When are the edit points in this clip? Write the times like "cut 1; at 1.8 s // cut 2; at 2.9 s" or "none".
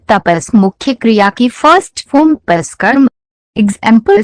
cut 1; at 2.7 s